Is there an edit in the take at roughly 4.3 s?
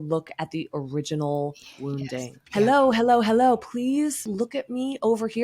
yes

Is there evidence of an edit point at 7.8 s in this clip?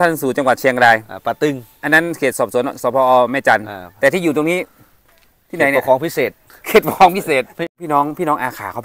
yes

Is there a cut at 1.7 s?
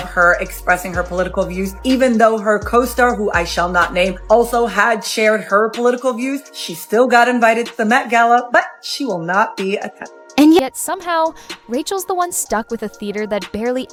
no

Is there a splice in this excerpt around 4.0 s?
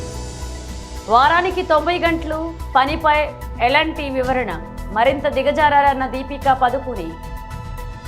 no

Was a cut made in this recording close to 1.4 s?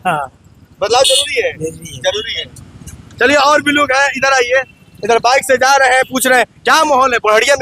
no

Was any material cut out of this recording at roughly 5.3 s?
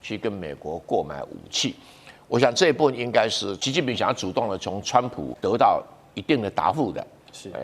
yes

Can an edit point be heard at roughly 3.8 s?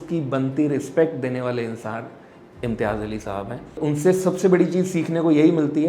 yes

